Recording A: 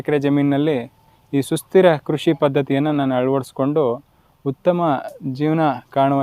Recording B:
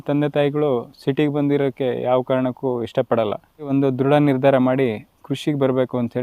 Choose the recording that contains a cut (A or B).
B